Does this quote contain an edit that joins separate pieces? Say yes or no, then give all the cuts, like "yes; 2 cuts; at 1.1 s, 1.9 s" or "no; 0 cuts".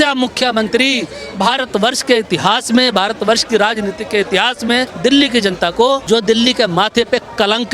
yes; 2 cuts; at 4.9 s, 6.0 s